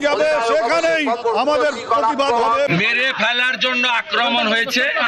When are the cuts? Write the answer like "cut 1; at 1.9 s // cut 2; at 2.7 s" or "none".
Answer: cut 1; at 1.2 s // cut 2; at 2.7 s